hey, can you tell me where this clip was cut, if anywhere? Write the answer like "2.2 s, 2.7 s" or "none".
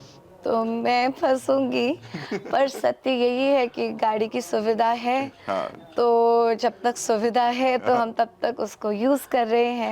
none